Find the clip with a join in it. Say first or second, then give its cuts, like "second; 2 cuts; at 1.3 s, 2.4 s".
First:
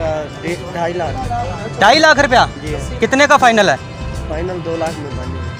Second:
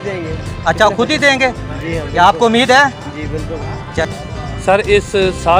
second; 1 cut; at 4.1 s